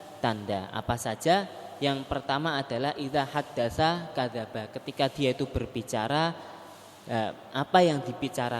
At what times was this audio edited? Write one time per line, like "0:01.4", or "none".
none